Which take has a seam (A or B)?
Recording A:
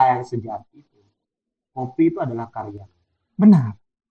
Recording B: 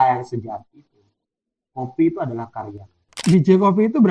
B